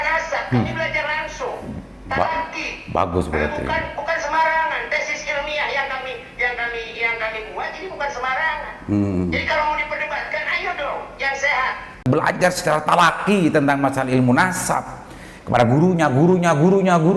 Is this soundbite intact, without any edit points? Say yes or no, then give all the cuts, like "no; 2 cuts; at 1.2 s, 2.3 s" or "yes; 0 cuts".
no; 1 cut; at 12.0 s